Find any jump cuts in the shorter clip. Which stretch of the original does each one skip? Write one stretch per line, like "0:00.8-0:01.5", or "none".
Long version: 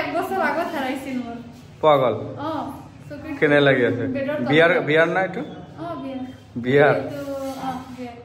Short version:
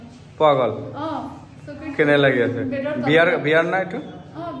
none